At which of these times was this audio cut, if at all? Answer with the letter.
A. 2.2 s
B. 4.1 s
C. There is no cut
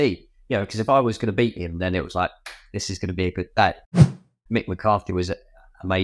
B